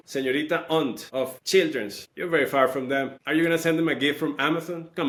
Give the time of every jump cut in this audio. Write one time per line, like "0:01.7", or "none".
none

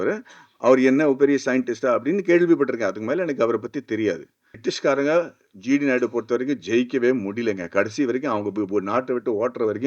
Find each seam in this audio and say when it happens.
0:04.5

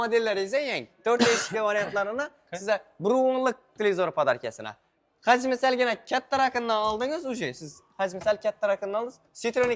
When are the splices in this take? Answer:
none

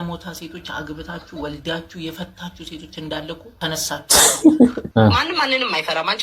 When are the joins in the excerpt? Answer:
0:03.5
0:04.8

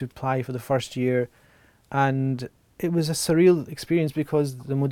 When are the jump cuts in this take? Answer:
0:02.6

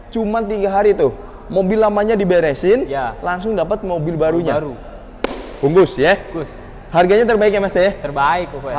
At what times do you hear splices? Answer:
none

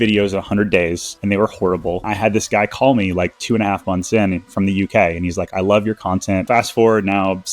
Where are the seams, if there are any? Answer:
0:01.1
0:02.1
0:06.4

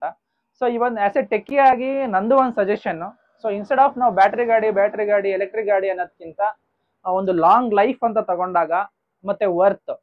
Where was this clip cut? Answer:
none

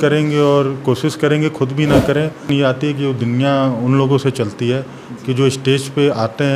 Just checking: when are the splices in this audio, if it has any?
0:02.4

